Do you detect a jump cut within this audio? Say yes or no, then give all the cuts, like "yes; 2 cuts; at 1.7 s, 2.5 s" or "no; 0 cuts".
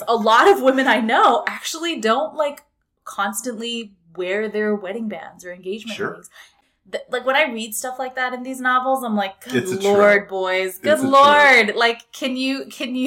yes; 1 cut; at 6.5 s